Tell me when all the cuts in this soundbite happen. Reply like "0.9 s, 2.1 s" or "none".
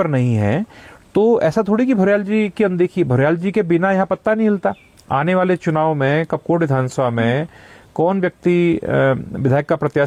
none